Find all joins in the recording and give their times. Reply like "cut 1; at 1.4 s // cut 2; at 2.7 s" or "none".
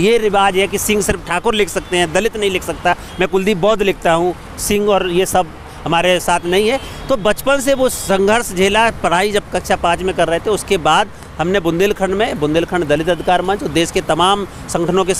none